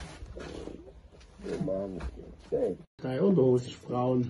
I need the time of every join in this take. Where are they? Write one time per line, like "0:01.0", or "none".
0:02.8